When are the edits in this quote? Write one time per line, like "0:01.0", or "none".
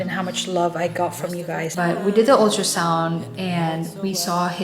0:01.7